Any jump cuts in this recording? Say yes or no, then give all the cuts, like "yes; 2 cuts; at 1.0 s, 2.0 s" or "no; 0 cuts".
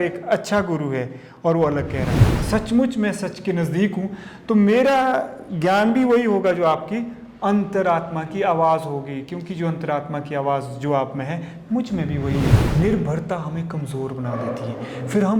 yes; 2 cuts; at 2.4 s, 12.6 s